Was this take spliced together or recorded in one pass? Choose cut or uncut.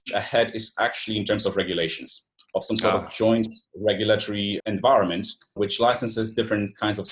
cut